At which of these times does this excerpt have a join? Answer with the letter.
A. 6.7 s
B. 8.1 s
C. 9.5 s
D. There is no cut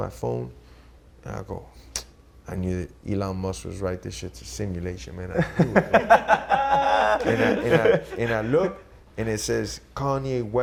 D